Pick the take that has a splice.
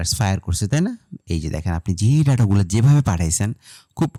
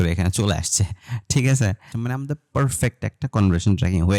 second; 1 cut; at 1.9 s

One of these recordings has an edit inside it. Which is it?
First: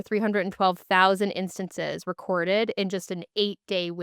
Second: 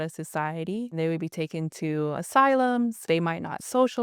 second; 3 cuts; at 0.9 s, 2.2 s, 3.0 s

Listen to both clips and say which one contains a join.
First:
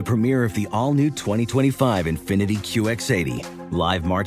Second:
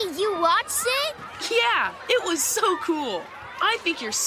second; 1 cut; at 1.2 s

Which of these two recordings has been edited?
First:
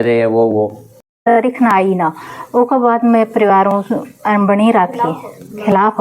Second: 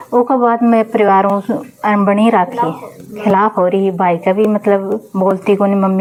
first; 1 cut; at 1.3 s

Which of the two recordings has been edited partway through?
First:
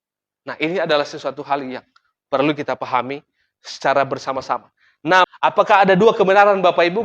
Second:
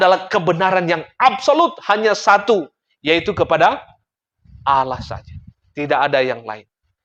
first; 1 cut; at 5.3 s

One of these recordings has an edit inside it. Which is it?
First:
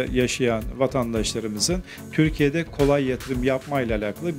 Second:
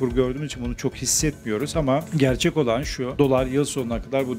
second; 2 cuts; at 2.1 s, 3.0 s

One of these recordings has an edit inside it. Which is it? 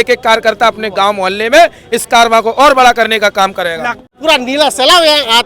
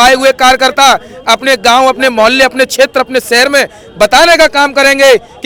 first; 1 cut; at 4.1 s

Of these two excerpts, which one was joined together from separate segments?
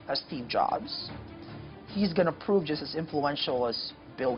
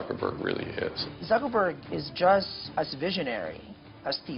second; 2 cuts; at 1.0 s, 2.6 s

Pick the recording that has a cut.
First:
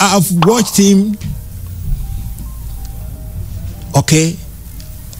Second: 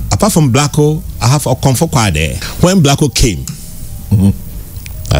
second; 1 cut; at 2.4 s

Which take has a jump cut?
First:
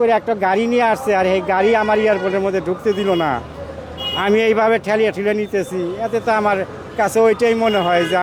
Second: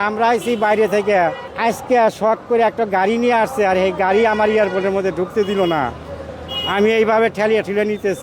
second; 1 cut; at 1.5 s

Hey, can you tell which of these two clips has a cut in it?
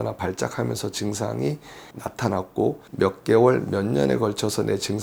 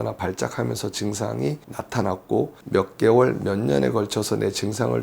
second; 1 cut; at 1.7 s

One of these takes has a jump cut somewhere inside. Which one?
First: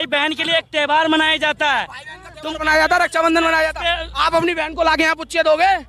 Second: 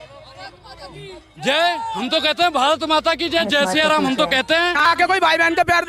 second; 1 cut; at 4.8 s

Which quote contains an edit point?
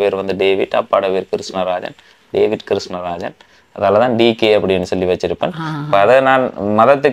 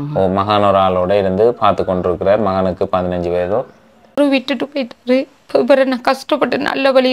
second; 1 cut; at 4.2 s

